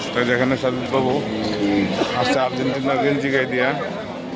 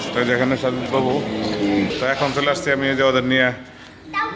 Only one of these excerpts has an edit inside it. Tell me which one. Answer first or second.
second